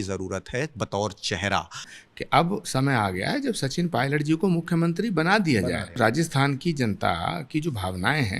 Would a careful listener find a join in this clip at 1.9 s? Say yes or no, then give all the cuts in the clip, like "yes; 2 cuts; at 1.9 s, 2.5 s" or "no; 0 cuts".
yes; 2 cuts; at 1.9 s, 6.0 s